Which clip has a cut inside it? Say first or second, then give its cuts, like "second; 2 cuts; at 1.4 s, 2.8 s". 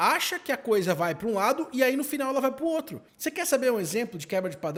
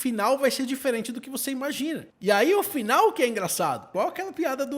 second; 2 cuts; at 2.1 s, 3.8 s